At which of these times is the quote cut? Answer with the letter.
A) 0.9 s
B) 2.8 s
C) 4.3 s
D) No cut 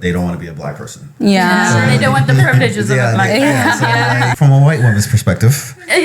C